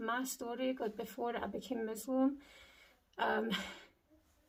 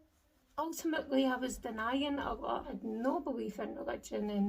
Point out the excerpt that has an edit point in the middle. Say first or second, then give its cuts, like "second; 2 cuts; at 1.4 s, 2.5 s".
second; 1 cut; at 2.7 s